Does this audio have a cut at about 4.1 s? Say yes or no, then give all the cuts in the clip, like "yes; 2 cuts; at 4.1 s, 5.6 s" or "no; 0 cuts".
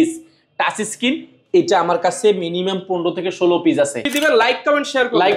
yes; 1 cut; at 4.1 s